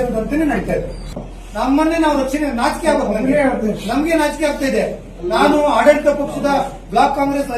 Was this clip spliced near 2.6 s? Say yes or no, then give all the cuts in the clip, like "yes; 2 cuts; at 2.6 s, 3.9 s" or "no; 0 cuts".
no; 1 cut; at 1.1 s